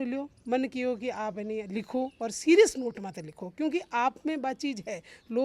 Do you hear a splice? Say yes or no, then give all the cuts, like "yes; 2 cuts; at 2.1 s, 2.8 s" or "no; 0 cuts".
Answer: no; 0 cuts